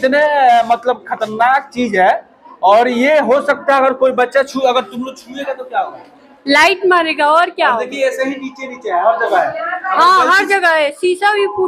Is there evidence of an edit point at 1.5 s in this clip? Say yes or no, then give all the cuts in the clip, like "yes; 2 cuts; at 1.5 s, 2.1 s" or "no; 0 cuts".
no; 0 cuts